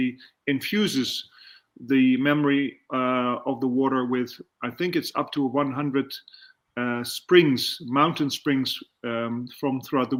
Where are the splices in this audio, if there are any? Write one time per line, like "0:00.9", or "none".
none